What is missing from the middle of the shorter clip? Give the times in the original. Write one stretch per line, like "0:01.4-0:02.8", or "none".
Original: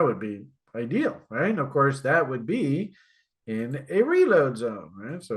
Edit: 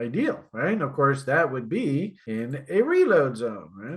0:03.0-0:03.4